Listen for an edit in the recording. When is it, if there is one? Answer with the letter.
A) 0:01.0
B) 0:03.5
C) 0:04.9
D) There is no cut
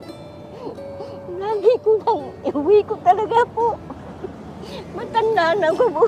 D